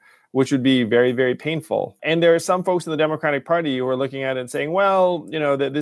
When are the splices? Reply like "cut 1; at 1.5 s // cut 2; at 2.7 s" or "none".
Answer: cut 1; at 2.0 s